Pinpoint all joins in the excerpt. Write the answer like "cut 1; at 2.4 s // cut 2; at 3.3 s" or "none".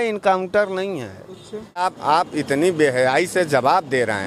cut 1; at 1.8 s